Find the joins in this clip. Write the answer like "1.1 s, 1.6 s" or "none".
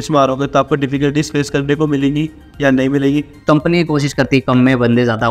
3.4 s